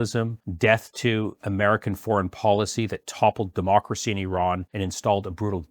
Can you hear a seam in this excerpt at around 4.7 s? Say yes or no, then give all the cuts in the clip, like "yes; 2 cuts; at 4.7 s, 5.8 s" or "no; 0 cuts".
yes; 1 cut; at 4.7 s